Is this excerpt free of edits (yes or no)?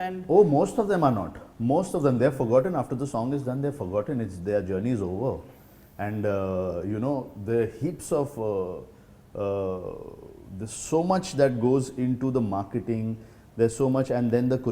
yes